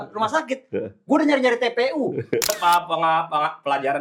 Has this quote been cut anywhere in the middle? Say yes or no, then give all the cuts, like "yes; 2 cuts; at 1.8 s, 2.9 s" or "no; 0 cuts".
yes; 1 cut; at 2.5 s